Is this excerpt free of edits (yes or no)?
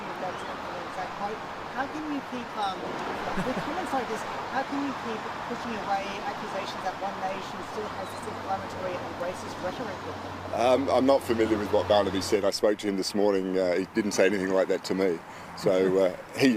yes